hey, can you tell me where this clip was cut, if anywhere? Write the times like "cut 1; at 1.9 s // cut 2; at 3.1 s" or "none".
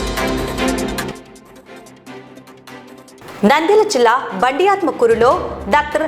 cut 1; at 1.1 s // cut 2; at 3.1 s